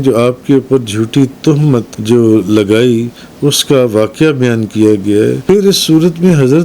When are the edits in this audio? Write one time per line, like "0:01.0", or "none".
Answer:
0:01.9
0:05.4